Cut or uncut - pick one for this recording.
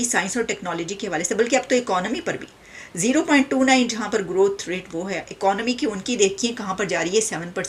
uncut